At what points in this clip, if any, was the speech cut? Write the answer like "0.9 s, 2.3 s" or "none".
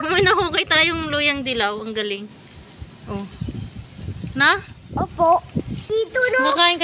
5.9 s